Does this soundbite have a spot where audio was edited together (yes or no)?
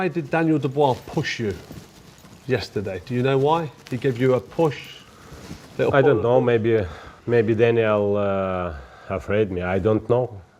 no